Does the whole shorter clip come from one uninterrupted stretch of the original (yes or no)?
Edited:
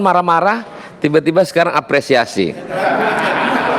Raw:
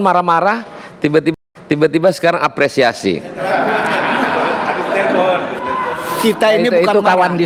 no